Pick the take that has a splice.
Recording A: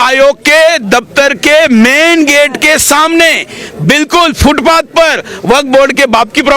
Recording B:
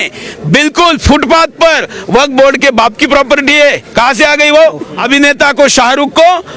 B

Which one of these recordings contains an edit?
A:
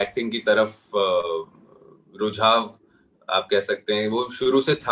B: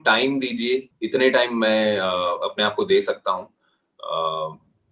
B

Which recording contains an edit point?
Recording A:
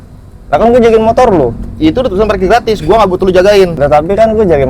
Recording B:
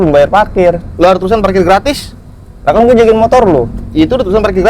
A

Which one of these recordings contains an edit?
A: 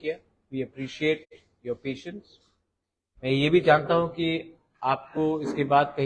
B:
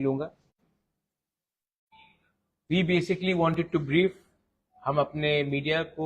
B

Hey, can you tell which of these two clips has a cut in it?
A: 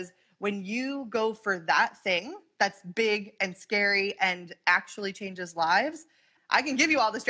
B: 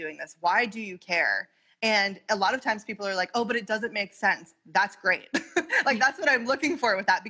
A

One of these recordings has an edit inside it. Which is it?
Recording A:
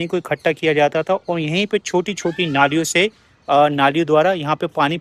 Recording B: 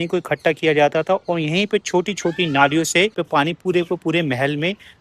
B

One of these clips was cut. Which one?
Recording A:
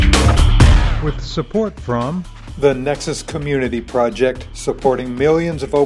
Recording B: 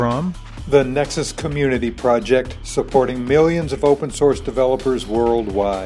A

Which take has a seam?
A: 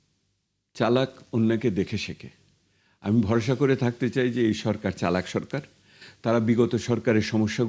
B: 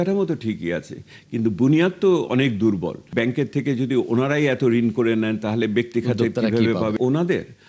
B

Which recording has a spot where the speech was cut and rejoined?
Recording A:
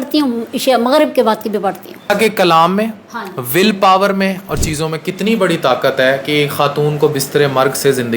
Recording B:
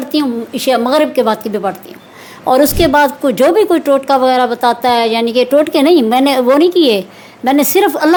A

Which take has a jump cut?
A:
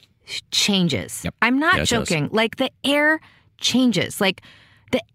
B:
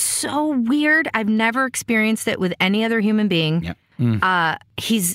B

